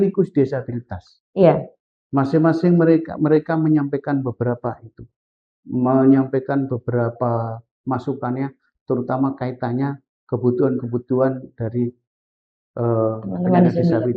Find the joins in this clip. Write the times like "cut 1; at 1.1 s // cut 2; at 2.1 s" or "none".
none

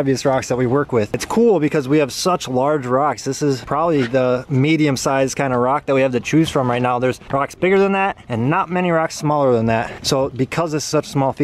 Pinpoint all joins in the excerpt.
none

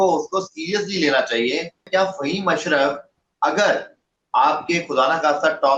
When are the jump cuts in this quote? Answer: cut 1; at 1.8 s

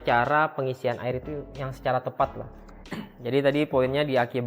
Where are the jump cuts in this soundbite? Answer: cut 1; at 2.8 s

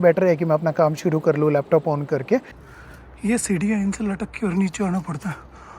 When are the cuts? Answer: cut 1; at 2.6 s

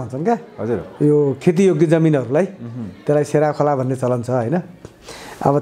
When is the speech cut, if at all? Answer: none

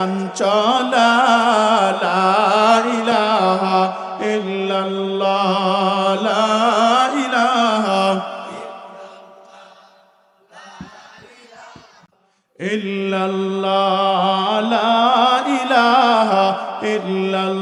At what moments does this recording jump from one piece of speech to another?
none

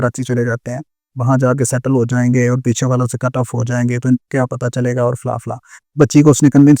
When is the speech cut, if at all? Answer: none

